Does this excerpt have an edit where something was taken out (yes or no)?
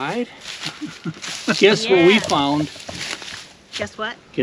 no